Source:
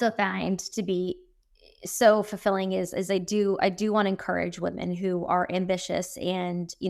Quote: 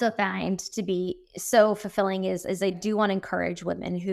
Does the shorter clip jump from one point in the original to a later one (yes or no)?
yes